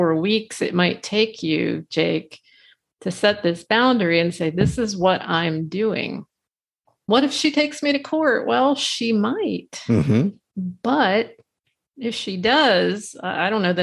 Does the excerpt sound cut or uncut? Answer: uncut